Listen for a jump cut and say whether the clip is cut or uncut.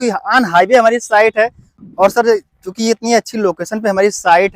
cut